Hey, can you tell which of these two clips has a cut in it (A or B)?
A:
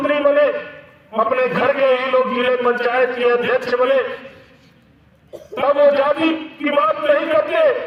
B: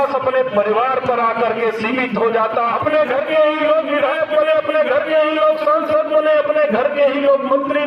B